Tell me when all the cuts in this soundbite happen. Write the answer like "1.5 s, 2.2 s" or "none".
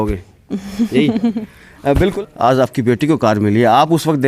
2.1 s